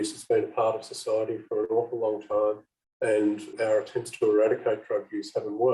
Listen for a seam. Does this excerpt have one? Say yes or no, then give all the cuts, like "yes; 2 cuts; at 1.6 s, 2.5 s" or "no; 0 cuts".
yes; 1 cut; at 3.5 s